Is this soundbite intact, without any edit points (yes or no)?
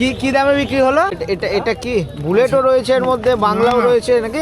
no